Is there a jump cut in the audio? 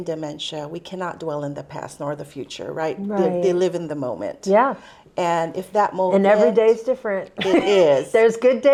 no; 0 cuts

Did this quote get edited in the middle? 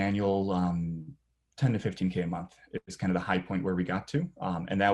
no; 0 cuts

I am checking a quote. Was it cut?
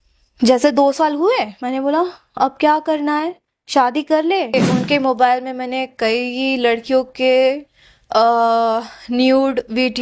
yes; 1 cut; at 4.5 s

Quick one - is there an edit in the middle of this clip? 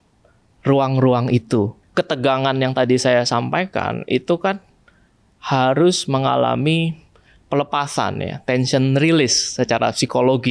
yes; 1 cut; at 1.8 s

